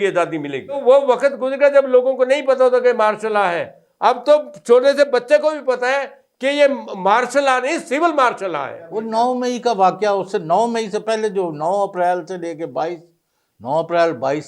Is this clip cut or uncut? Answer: cut